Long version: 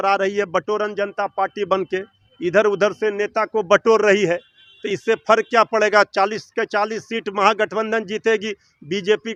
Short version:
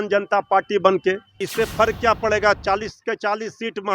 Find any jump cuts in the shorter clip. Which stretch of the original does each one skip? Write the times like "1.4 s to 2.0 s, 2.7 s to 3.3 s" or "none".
2.2 s to 4.8 s